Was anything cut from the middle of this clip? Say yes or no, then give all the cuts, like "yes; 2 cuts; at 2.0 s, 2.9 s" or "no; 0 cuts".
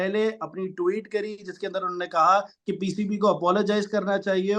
no; 0 cuts